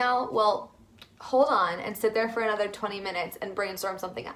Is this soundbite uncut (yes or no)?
yes